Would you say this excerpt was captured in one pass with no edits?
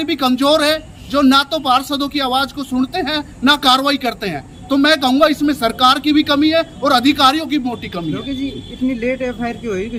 yes; 0 cuts

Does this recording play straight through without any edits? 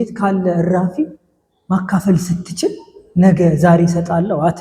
yes; 0 cuts

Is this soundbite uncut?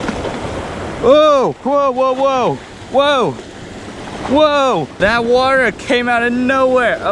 no; 1 cut; at 4.9 s

